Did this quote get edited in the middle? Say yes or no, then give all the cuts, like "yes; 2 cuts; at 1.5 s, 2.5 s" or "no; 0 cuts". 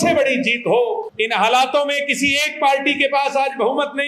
yes; 1 cut; at 1.1 s